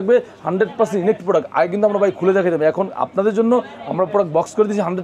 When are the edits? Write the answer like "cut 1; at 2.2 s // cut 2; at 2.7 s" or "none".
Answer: none